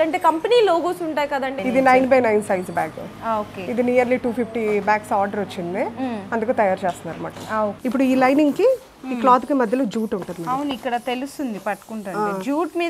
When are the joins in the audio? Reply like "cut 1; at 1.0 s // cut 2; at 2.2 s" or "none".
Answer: cut 1; at 1.6 s // cut 2; at 7.8 s

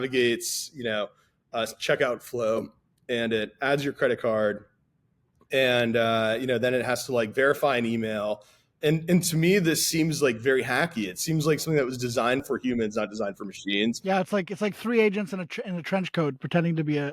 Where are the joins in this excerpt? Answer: cut 1; at 12.4 s

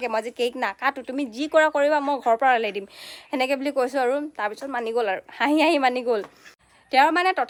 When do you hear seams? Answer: none

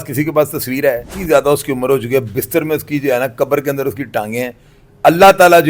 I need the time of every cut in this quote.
cut 1; at 1.2 s

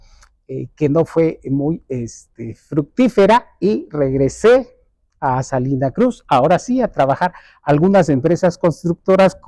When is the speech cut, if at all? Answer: none

